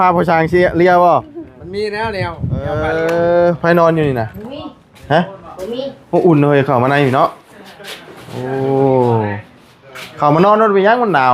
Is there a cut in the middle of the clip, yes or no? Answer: yes